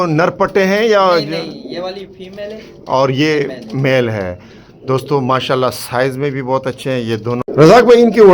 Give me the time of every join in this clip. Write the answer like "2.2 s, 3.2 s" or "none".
7.4 s